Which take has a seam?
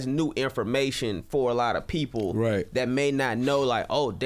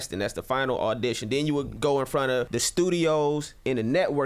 second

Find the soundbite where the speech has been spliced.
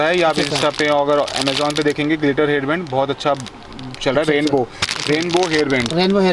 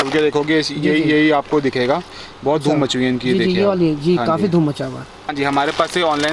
second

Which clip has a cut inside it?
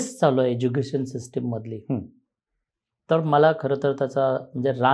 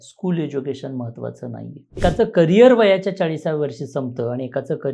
second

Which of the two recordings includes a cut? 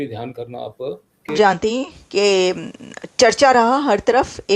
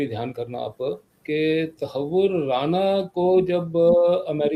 first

